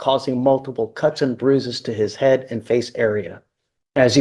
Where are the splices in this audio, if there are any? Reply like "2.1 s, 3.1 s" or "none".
none